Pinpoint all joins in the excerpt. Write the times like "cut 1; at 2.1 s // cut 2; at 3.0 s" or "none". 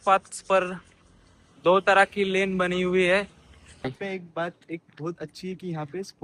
cut 1; at 3.9 s